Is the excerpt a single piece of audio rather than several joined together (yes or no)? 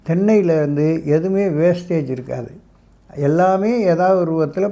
yes